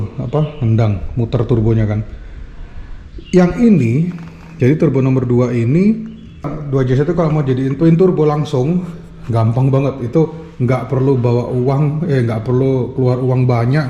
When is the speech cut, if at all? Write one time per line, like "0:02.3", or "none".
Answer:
0:06.5